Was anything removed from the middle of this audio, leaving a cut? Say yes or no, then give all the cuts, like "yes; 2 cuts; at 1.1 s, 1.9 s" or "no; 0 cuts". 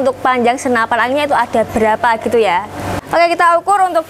no; 0 cuts